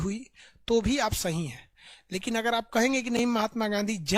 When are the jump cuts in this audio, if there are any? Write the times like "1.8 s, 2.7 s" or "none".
none